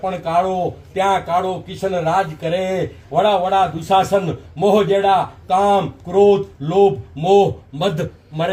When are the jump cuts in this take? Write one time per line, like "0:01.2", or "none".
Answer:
none